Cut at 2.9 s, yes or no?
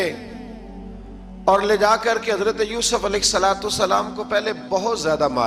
no